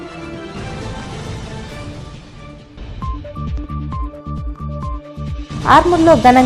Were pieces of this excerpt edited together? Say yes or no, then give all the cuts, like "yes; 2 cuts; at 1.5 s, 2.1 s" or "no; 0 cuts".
yes; 3 cuts; at 0.8 s, 2.9 s, 5.0 s